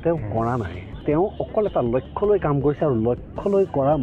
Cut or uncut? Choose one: cut